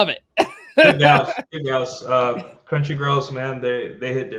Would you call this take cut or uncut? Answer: uncut